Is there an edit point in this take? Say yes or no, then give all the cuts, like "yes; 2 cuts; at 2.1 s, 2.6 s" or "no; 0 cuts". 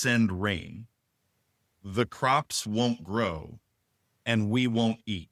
no; 0 cuts